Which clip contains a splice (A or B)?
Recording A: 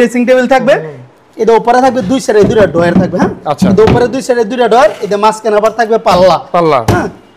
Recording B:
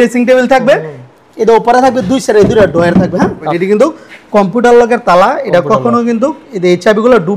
B